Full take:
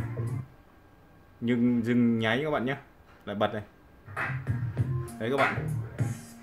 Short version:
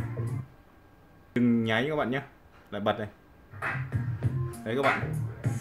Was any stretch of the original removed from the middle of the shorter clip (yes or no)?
yes